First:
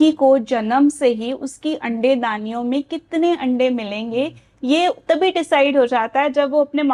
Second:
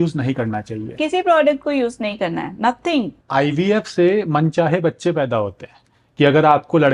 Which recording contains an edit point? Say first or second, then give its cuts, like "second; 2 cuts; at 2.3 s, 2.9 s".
second; 1 cut; at 3.2 s